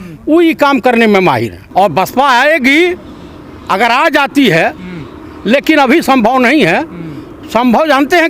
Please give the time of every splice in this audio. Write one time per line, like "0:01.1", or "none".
0:01.6